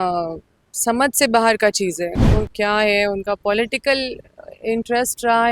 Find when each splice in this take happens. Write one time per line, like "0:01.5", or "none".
0:02.2

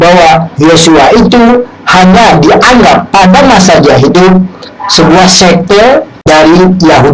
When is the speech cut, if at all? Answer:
0:06.1

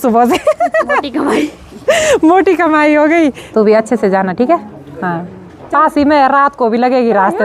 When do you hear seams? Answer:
0:03.4

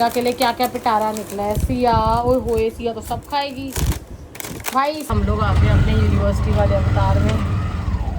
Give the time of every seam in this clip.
0:05.1

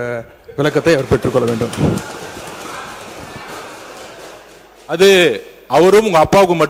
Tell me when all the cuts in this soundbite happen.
none

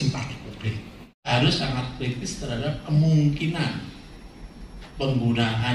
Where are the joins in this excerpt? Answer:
0:01.3

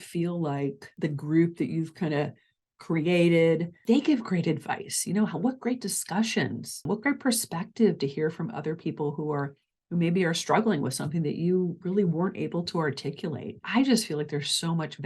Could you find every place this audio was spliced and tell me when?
0:00.9
0:03.8
0:06.8
0:13.6

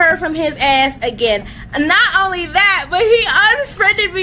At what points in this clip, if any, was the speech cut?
none

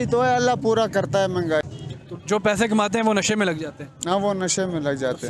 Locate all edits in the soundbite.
0:01.6

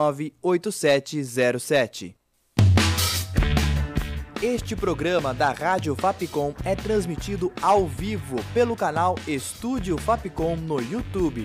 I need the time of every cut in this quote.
0:06.5

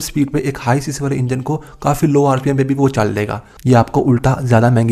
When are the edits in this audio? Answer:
0:03.5

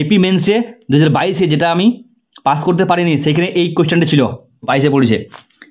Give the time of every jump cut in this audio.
0:04.7

